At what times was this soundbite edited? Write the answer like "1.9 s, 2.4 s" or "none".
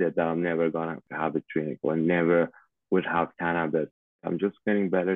1.1 s, 4.2 s